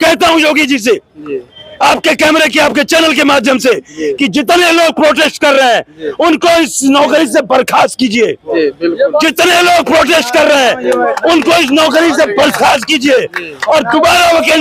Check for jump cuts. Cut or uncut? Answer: uncut